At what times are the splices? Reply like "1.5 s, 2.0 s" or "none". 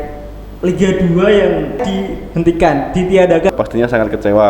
1.8 s, 3.5 s